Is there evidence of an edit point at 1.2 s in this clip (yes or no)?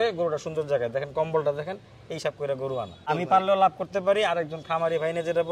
no